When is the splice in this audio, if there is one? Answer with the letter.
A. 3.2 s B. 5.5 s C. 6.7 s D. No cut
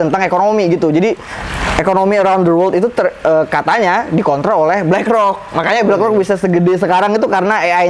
D